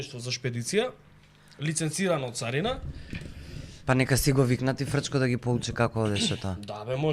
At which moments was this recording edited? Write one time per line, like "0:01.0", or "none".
none